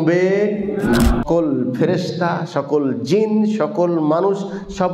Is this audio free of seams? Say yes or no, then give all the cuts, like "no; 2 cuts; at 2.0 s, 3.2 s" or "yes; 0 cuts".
no; 1 cut; at 1.2 s